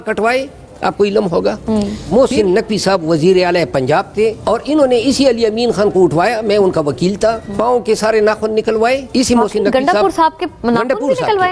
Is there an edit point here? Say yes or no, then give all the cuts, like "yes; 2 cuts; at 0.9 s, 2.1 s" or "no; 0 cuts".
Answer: yes; 4 cuts; at 2.0 s, 4.4 s, 7.5 s, 9.1 s